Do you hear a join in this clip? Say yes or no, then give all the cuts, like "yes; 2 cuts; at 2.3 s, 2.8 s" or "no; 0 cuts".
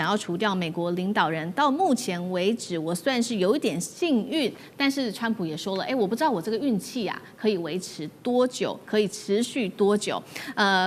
no; 0 cuts